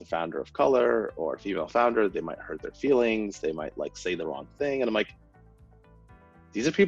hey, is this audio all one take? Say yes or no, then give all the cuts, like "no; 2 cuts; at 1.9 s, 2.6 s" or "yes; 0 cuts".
yes; 0 cuts